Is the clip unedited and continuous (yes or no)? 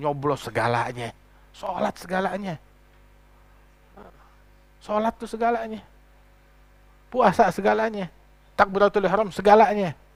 yes